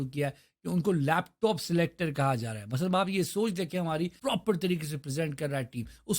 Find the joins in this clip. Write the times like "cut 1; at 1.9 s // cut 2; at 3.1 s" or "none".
cut 1; at 4.2 s